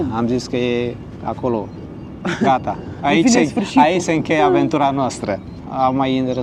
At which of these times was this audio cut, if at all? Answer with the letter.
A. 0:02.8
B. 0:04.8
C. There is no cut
C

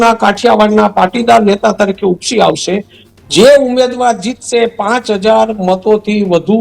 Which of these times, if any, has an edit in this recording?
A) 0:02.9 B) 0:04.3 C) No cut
A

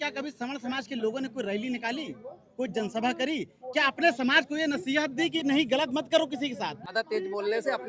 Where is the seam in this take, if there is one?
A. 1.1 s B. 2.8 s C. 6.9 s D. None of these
C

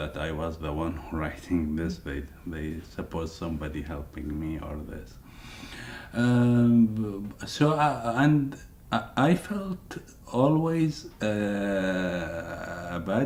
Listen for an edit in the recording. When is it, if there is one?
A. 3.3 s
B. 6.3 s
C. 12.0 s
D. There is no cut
D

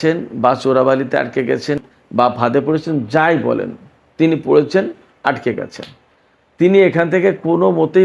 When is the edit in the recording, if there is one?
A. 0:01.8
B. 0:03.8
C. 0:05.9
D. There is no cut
A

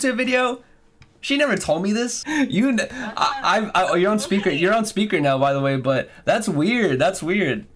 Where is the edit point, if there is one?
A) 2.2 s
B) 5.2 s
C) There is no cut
A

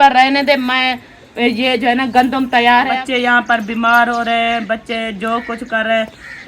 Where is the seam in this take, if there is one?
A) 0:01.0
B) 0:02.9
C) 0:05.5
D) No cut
B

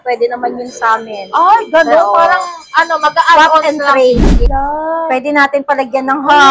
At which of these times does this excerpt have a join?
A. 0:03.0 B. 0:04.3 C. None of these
B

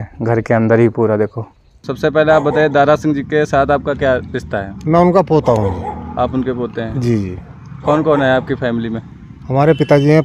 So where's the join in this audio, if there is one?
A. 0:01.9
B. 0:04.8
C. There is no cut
A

